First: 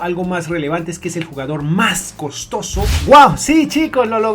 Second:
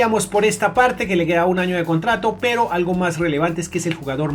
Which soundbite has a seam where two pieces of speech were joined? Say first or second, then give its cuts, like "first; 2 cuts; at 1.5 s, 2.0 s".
first; 1 cut; at 2.9 s